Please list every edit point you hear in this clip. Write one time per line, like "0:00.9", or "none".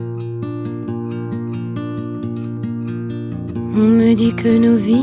none